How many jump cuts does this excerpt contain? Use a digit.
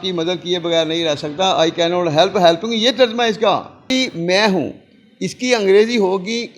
1